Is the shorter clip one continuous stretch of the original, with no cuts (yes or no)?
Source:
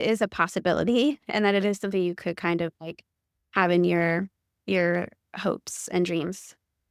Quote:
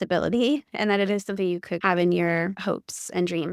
no